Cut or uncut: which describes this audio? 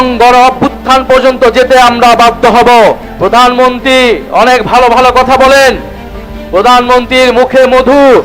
cut